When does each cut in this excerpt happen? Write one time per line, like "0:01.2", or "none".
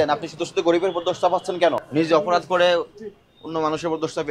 0:01.9